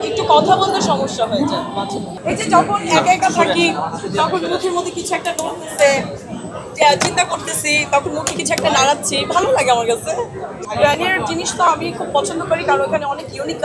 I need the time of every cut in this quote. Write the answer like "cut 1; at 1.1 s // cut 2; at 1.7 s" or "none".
cut 1; at 2.1 s // cut 2; at 10.6 s